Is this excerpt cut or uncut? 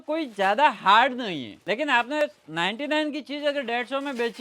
cut